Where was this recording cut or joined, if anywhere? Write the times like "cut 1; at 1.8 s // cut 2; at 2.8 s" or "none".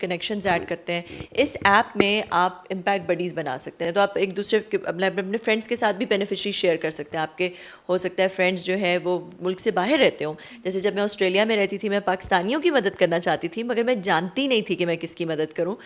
none